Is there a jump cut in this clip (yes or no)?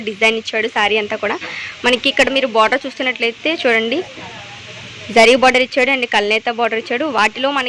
no